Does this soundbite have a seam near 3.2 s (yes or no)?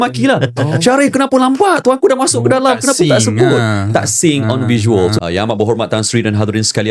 no